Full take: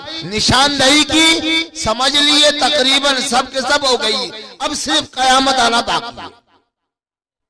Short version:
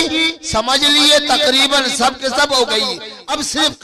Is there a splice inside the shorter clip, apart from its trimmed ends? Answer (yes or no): no